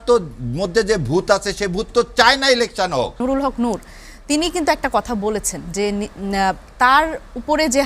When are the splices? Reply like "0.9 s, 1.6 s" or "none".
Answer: 3.2 s